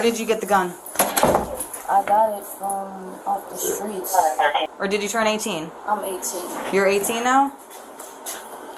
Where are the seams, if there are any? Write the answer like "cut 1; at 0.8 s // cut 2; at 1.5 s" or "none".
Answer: cut 1; at 4.7 s